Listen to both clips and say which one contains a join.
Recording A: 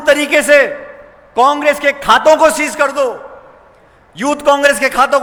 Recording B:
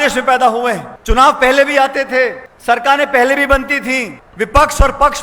B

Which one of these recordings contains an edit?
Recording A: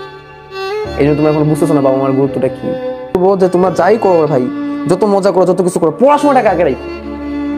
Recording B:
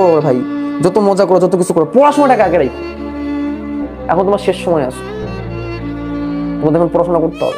A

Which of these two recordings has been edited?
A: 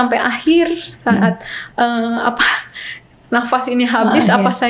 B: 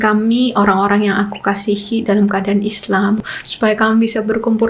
B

